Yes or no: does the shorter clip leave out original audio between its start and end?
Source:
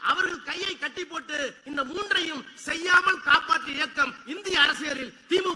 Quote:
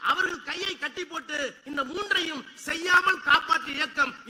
no